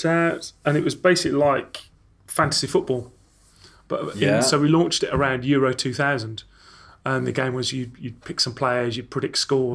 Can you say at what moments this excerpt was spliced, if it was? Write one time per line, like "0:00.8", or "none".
none